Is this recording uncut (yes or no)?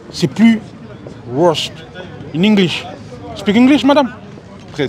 yes